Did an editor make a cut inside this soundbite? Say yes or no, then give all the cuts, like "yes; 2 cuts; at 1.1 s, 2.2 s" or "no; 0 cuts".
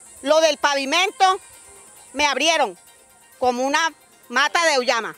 no; 0 cuts